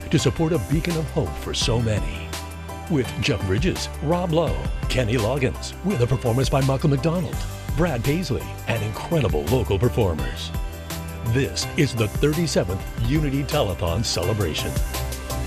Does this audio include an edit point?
no; 0 cuts

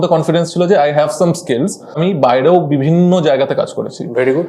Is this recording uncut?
no; 1 cut; at 2.0 s

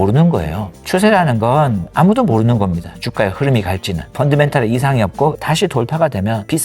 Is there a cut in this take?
yes; 1 cut; at 5.4 s

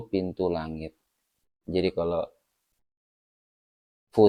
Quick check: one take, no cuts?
yes; 0 cuts

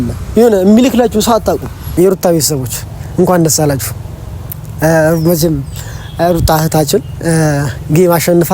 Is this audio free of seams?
no; 1 cut; at 1.8 s

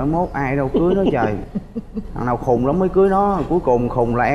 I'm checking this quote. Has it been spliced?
no; 0 cuts

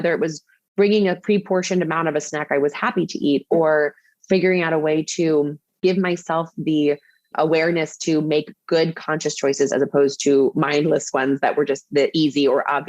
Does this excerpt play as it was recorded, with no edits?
no; 1 cut; at 5.8 s

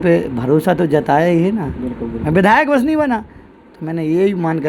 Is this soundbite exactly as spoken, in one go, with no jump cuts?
yes; 0 cuts

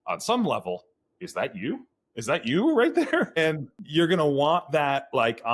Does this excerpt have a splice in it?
yes; 1 cut; at 3.7 s

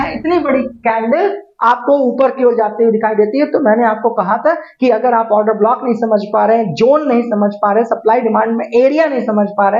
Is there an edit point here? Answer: no; 0 cuts

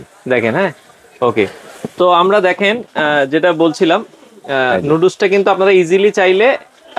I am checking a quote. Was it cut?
yes; 1 cut; at 1.7 s

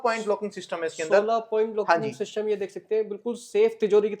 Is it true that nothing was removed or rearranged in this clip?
yes; 0 cuts

